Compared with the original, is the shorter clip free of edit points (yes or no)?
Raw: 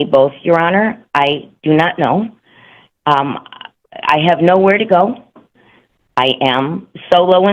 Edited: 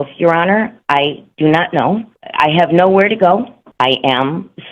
no